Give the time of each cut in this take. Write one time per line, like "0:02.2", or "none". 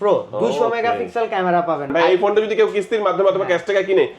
0:01.9